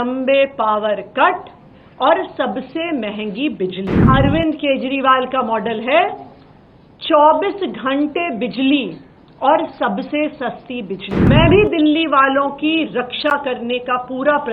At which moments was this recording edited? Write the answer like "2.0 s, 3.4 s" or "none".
4.0 s, 11.3 s

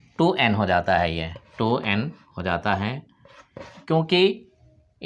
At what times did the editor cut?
none

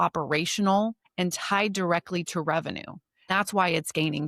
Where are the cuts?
1.0 s, 3.3 s

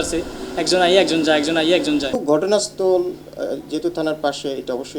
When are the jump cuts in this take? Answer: 2.2 s

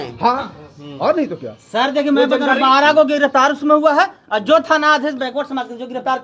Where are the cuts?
none

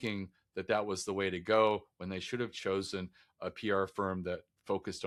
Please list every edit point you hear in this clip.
none

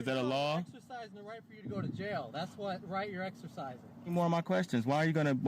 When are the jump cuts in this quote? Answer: 4.1 s

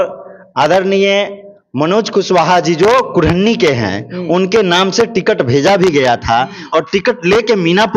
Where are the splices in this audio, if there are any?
none

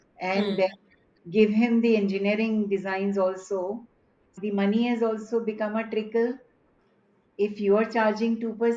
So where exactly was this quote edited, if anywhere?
4.4 s, 6.7 s

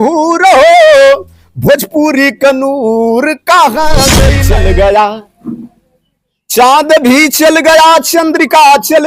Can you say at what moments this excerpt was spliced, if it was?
4.3 s

